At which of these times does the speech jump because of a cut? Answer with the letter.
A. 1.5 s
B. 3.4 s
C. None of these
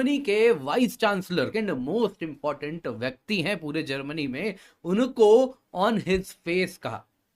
A